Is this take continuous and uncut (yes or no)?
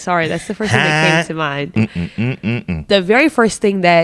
yes